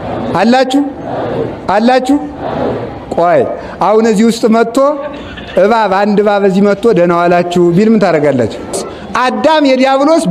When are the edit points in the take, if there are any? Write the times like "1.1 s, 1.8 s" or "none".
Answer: 8.9 s